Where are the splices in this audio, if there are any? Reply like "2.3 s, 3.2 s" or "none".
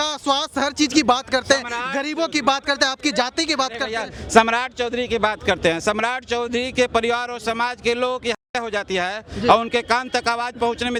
none